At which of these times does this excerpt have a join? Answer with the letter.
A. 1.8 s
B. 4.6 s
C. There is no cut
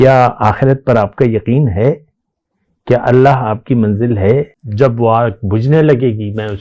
B